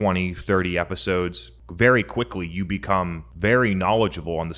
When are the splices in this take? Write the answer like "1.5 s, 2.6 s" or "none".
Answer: 1.4 s, 3.2 s